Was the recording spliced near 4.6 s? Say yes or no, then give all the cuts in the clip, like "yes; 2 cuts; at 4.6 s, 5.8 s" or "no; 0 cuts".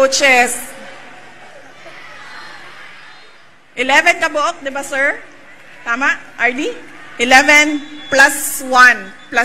no; 1 cut; at 3.2 s